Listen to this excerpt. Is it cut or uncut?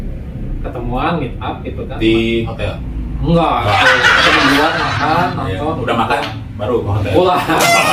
uncut